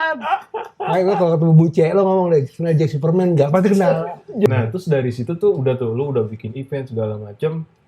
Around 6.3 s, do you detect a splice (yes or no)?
no